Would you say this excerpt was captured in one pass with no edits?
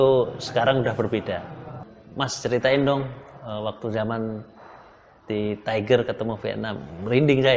no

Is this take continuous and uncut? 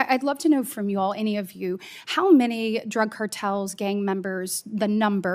yes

